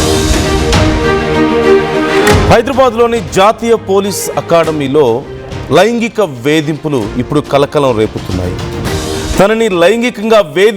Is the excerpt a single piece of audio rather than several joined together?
no; 1 cut; at 2.4 s

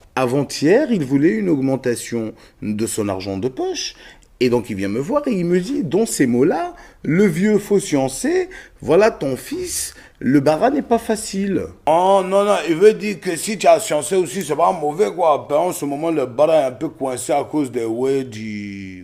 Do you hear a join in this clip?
no; 0 cuts

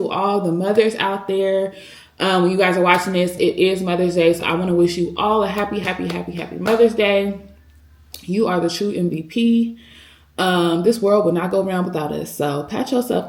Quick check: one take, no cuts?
yes; 0 cuts

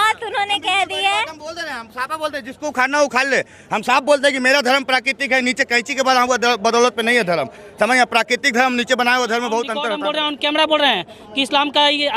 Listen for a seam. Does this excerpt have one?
yes; 1 cut; at 9.9 s

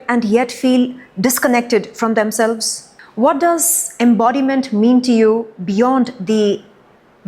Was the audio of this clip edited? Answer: yes; 1 cut; at 3.0 s

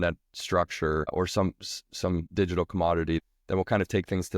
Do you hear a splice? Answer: yes; 3 cuts; at 1.1 s, 2.3 s, 3.2 s

